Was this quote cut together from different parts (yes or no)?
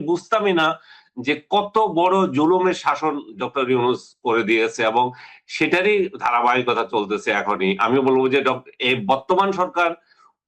no